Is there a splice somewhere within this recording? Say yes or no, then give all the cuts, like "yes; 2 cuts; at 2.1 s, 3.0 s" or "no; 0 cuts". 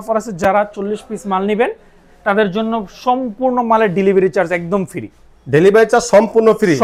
no; 0 cuts